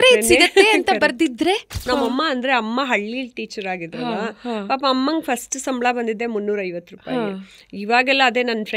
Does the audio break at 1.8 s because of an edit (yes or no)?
yes